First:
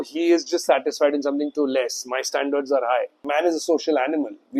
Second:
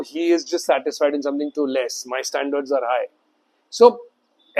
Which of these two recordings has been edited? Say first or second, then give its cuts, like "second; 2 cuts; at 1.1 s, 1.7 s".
first; 1 cut; at 3.2 s